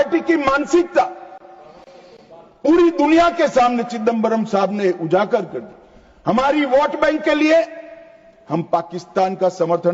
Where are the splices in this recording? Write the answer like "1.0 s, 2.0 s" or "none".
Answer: none